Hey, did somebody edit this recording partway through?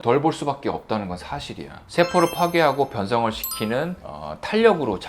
yes; 1 cut; at 1.8 s

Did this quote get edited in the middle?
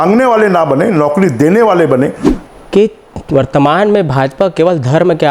yes; 1 cut; at 2.3 s

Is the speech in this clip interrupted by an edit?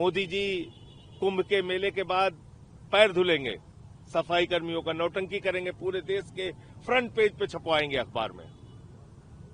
no; 0 cuts

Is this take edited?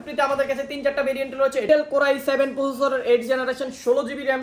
yes; 1 cut; at 1.7 s

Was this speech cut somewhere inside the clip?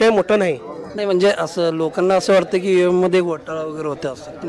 no; 0 cuts

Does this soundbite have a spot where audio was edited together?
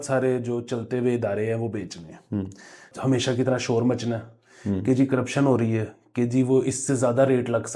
yes; 1 cut; at 2.9 s

